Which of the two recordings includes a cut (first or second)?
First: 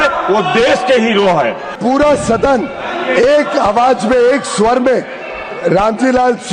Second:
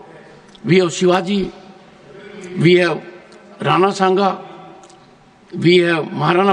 first